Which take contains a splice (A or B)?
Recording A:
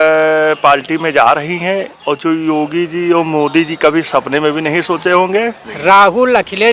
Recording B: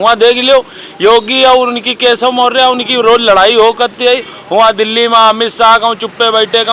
A